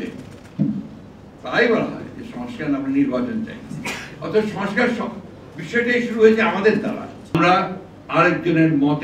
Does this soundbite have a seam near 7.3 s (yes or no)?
yes